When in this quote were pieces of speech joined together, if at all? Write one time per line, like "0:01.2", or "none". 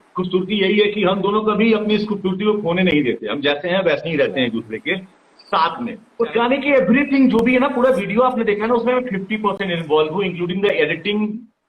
0:06.0